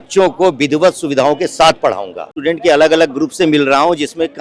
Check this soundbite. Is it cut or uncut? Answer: cut